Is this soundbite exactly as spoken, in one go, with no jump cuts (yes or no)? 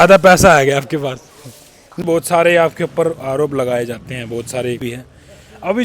no